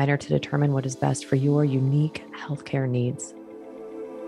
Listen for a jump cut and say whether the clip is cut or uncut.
cut